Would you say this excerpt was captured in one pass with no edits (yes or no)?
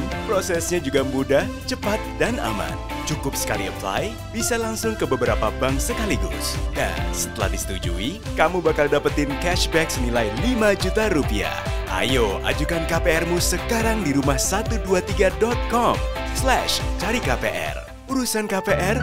yes